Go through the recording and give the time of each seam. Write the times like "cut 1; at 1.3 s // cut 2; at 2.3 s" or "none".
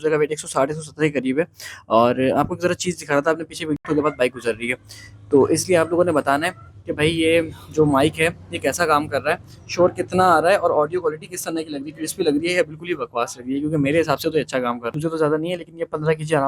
cut 1; at 3.8 s // cut 2; at 14.9 s